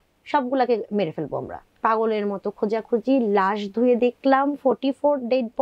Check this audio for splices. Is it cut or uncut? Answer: cut